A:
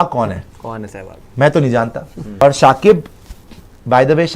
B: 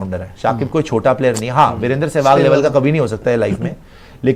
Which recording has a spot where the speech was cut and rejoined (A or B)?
A